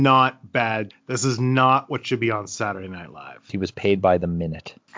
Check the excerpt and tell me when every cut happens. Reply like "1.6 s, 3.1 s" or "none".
0.9 s, 3.5 s